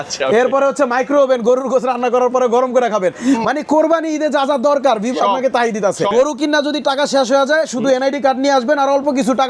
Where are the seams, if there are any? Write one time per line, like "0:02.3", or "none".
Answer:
0:06.1